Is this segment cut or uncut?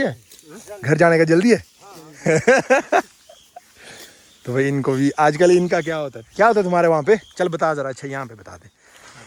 uncut